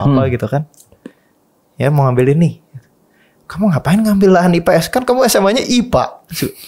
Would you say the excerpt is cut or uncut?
uncut